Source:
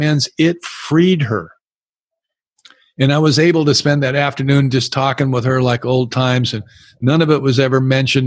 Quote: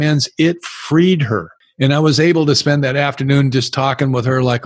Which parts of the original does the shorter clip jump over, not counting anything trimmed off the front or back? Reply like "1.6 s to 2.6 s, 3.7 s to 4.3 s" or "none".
1.6 s to 2.8 s